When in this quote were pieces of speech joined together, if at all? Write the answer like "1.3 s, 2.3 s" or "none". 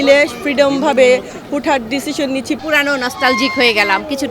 2.6 s